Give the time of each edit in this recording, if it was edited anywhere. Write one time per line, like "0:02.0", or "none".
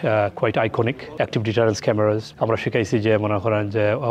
0:01.0
0:02.3